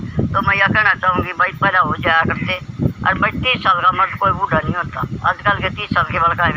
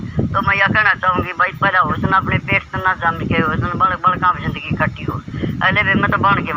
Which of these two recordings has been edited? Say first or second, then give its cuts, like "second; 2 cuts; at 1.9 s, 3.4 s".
second; 1 cut; at 2.0 s